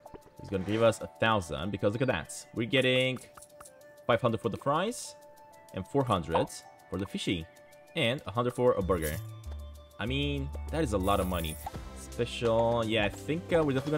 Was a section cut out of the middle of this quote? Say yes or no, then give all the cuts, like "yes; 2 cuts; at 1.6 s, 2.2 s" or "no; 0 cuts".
yes; 1 cut; at 11.6 s